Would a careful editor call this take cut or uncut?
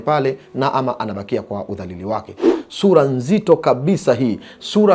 cut